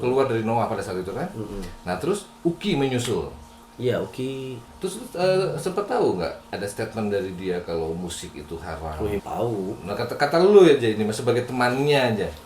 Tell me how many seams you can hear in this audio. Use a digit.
2